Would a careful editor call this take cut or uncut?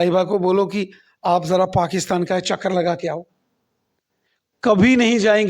uncut